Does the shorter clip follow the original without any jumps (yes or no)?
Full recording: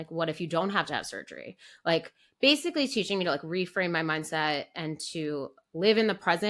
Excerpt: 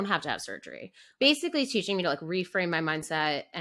no